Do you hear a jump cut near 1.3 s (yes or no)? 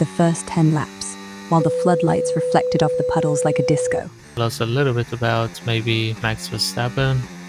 no